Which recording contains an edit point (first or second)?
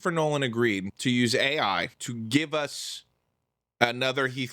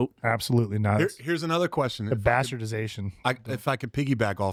first